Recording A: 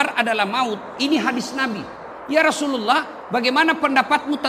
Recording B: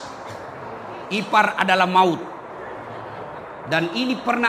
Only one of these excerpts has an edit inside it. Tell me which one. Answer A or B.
A